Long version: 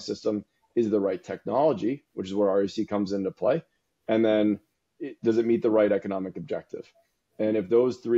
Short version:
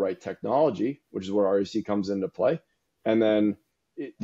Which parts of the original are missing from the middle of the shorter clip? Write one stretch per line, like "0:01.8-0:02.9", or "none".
none